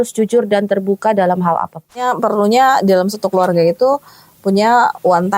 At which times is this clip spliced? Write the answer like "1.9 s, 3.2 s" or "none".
2.0 s